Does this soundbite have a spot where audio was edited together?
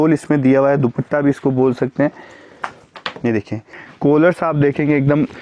yes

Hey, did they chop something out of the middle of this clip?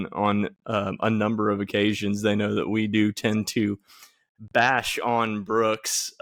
no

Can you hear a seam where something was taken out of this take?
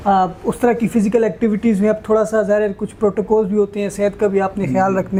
no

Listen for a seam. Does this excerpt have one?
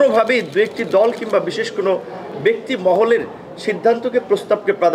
no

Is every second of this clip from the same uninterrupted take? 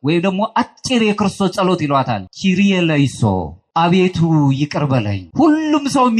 no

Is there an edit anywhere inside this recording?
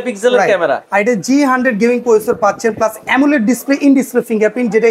no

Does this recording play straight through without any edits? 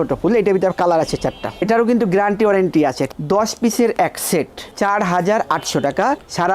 no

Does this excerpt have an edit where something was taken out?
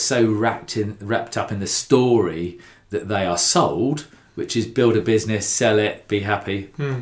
no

